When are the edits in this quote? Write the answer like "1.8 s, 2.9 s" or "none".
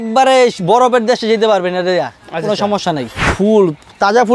3.3 s